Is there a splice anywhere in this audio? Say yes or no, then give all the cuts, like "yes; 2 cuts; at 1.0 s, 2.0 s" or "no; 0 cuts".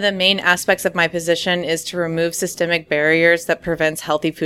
no; 0 cuts